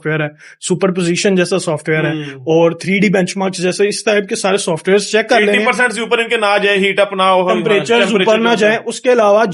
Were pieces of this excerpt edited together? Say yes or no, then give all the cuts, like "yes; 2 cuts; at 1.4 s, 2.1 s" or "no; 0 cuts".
no; 0 cuts